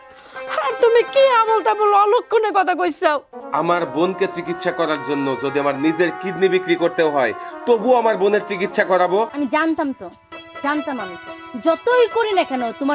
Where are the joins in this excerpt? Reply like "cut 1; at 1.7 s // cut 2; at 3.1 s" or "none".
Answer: cut 1; at 3.4 s // cut 2; at 9.3 s